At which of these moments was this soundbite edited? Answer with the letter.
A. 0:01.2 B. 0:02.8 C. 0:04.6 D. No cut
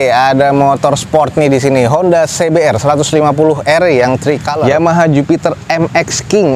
C